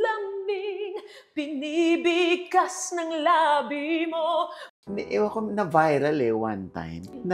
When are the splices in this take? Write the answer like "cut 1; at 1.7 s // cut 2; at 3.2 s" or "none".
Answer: cut 1; at 4.6 s